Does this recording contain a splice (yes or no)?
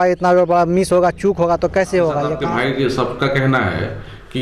yes